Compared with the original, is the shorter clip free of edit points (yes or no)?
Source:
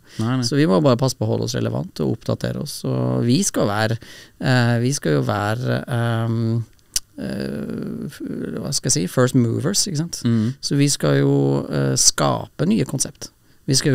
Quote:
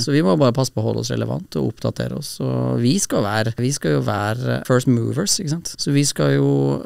no